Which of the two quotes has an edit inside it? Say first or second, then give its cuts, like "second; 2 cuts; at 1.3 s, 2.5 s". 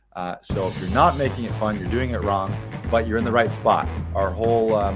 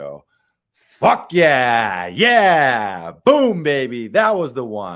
first; 1 cut; at 4.0 s